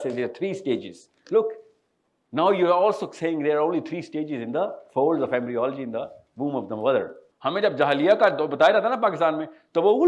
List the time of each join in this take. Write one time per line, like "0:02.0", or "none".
0:07.2

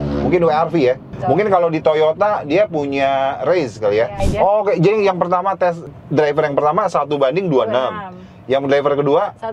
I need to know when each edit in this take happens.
0:01.1
0:04.2
0:05.8

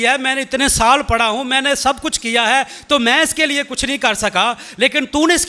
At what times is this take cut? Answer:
none

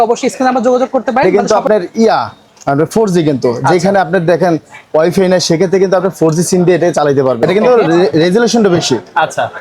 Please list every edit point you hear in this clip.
0:01.2
0:07.4

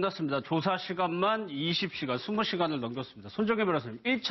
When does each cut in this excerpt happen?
0:02.0

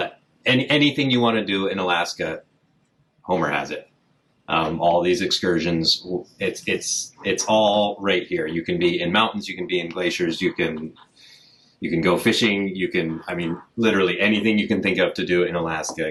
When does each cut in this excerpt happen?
none

